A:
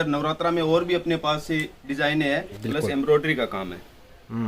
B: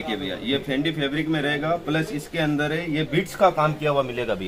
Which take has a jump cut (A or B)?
A